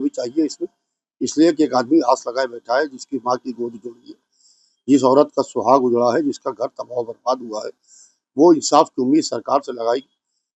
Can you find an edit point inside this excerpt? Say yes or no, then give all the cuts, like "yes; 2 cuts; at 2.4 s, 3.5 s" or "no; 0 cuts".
no; 0 cuts